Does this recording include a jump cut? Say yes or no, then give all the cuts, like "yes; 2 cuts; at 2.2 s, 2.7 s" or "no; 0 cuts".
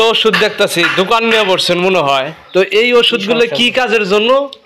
no; 0 cuts